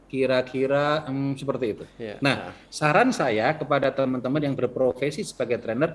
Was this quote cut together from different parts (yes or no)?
no